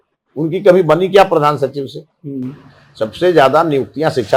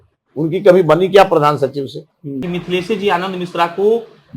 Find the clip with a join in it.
second; 1 cut; at 2.5 s

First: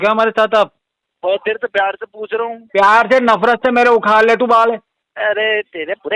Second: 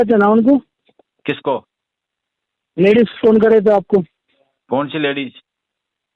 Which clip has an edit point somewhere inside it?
first; 2 cuts; at 1.0 s, 5.0 s

